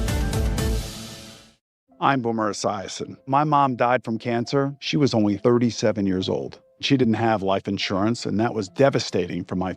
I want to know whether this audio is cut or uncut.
cut